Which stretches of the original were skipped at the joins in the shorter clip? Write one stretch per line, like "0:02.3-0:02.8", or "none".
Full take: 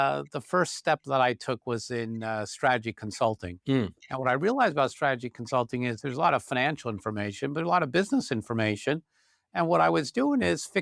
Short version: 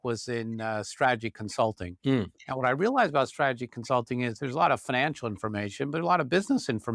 none